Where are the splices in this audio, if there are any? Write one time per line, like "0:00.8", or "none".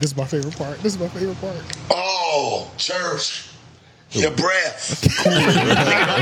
none